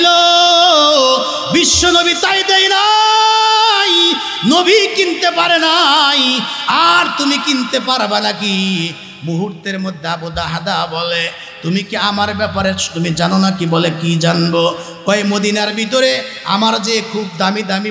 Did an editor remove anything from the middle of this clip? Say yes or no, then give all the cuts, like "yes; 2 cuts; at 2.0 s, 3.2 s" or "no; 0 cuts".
no; 0 cuts